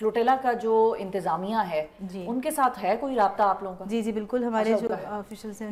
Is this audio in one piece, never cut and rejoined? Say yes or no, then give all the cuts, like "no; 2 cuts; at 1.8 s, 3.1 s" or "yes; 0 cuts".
yes; 0 cuts